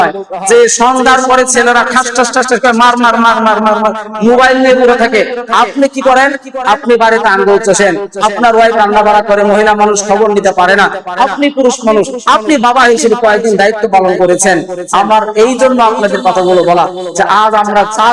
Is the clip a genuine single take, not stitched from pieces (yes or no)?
yes